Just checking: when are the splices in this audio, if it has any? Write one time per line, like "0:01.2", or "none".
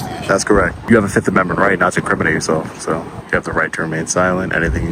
0:00.9
0:03.2